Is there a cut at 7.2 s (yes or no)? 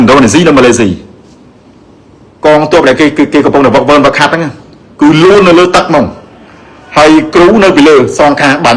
no